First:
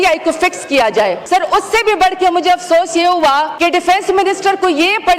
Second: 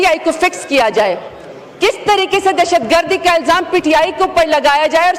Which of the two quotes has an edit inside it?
first; 2 cuts; at 1.2 s, 3.5 s

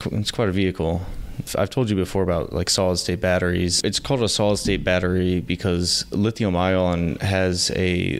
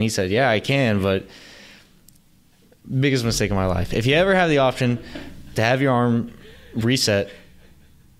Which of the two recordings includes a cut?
first; 2 cuts; at 1.5 s, 3.8 s

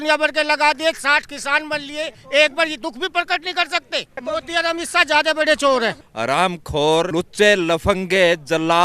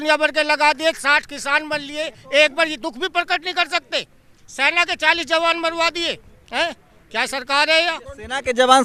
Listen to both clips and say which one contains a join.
first; 3 cuts; at 4.2 s, 6.1 s, 7.1 s

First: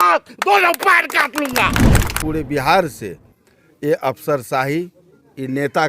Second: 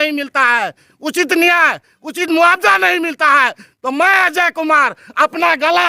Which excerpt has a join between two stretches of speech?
first; 1 cut; at 2.1 s

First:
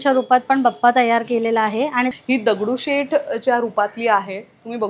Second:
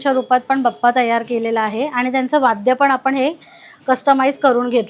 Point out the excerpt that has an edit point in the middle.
first; 1 cut; at 2.1 s

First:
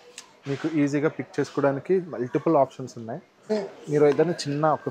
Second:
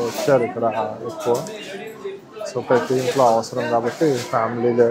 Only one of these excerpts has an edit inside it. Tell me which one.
first; 1 cut; at 3.5 s

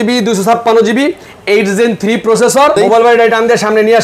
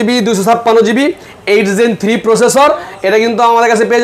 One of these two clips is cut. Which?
first; 1 cut; at 2.8 s

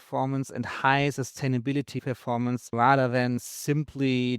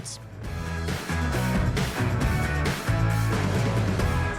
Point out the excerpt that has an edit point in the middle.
first; 1 cut; at 2.7 s

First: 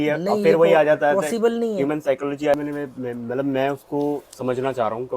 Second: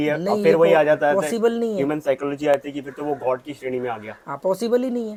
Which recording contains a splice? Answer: first; 1 cut; at 2.5 s

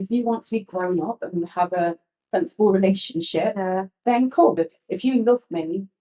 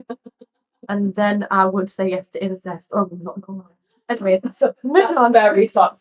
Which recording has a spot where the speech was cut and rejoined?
first; 1 cut; at 4.6 s

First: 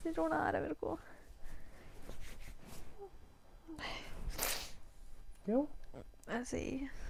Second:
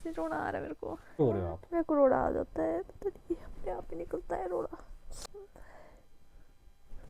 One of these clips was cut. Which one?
second; 2 cuts; at 1.2 s, 5.2 s

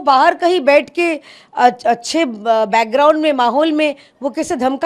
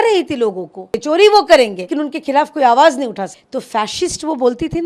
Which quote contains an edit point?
second; 3 cuts; at 1.0 s, 1.8 s, 3.3 s

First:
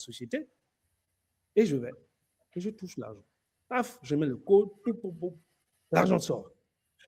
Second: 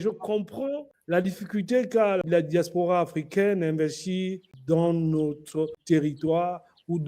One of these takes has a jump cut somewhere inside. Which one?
second; 4 cuts; at 0.9 s, 2.2 s, 4.5 s, 5.8 s

